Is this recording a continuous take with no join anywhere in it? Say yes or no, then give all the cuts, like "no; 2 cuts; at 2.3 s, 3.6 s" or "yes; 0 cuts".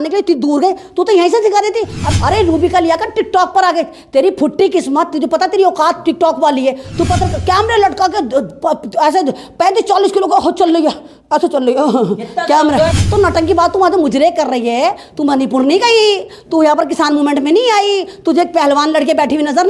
no; 2 cuts; at 2.0 s, 13.0 s